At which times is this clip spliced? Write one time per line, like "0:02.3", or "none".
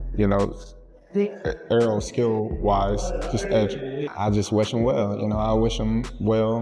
0:04.0